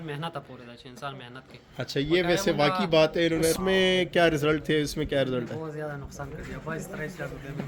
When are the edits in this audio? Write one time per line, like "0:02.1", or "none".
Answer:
0:03.6